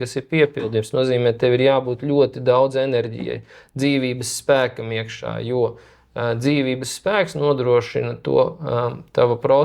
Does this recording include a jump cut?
no; 0 cuts

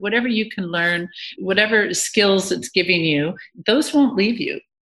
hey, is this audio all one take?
yes; 0 cuts

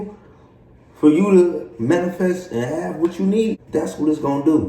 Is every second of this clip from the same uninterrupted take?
no; 1 cut; at 3.6 s

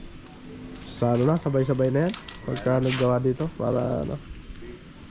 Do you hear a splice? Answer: no; 0 cuts

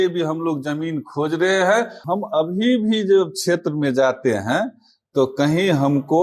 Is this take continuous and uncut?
no; 1 cut; at 2.0 s

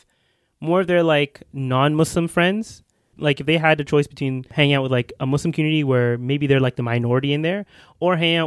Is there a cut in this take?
yes; 2 cuts; at 3.1 s, 4.4 s

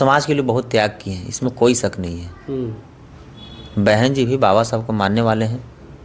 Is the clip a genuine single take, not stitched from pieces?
yes; 0 cuts

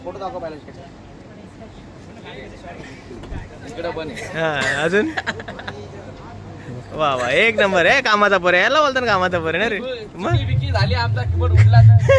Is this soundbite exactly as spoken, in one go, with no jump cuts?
yes; 0 cuts

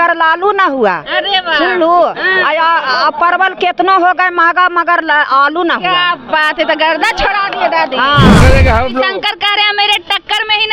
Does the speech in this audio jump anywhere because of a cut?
yes; 1 cut; at 8.3 s

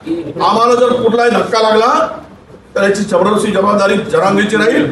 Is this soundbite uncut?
yes; 0 cuts

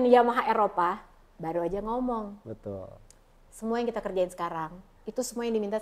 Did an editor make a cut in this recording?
no; 0 cuts

